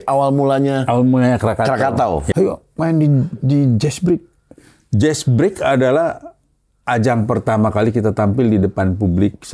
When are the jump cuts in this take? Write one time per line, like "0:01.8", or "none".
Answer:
0:02.3